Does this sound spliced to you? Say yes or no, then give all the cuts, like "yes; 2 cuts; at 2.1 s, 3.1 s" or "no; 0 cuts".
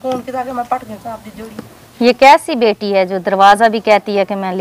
no; 0 cuts